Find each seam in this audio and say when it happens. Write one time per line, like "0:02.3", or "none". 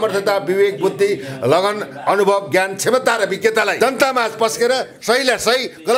0:03.7